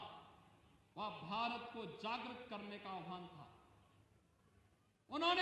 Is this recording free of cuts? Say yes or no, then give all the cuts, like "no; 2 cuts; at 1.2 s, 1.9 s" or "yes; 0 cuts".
yes; 0 cuts